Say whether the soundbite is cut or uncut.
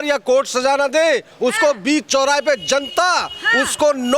uncut